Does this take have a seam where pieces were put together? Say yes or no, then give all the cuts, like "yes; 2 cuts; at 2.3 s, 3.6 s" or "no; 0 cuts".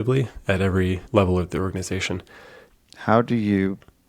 yes; 2 cuts; at 1.0 s, 2.6 s